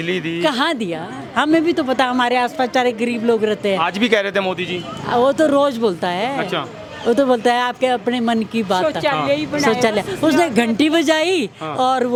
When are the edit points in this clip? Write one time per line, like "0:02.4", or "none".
none

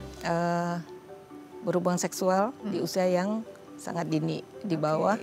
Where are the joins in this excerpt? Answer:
none

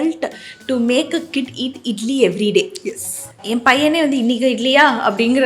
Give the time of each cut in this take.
none

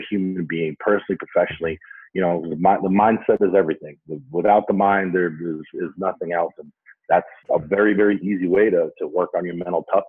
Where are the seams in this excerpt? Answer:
0:07.3

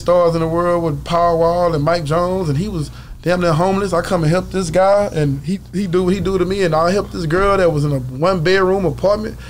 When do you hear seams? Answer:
none

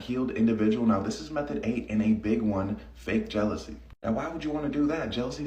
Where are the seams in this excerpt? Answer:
none

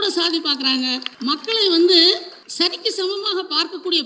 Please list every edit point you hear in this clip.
0:01.1
0:02.4

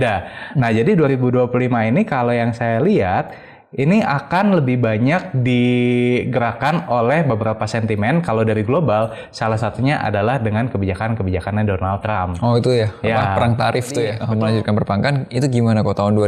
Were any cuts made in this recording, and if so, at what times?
0:14.2

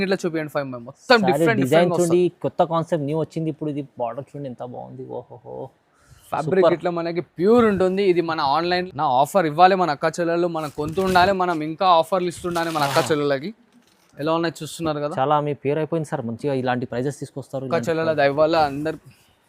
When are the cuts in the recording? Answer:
0:08.9

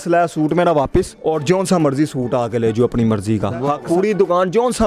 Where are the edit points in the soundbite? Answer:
0:01.1
0:03.7

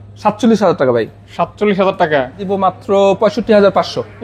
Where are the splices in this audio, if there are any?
0:02.4

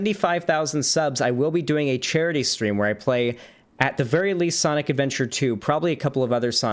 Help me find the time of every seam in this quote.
none

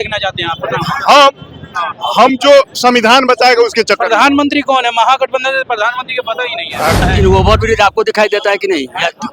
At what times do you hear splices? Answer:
0:07.0

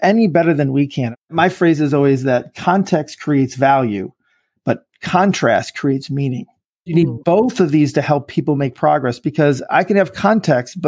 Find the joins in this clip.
0:01.1
0:06.9

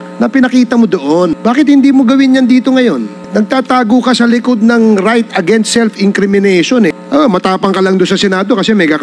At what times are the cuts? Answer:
0:01.4
0:03.2
0:06.9

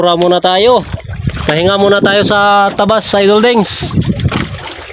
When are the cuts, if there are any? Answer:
none

